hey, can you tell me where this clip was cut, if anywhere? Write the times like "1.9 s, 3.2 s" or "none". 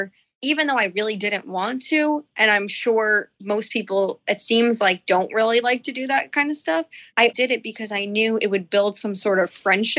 7.3 s